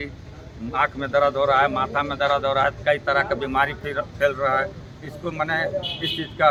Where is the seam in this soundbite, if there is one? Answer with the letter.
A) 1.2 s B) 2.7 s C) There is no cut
C